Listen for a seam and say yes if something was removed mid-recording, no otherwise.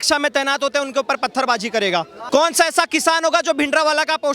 yes